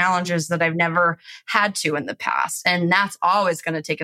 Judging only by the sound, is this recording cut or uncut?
uncut